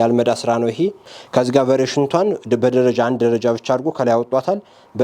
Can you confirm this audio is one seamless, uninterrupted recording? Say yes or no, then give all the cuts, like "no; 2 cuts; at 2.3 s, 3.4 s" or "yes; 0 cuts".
no; 1 cut; at 1.1 s